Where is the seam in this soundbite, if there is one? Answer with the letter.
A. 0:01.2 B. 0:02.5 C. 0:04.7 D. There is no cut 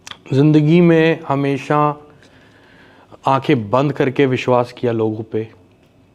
D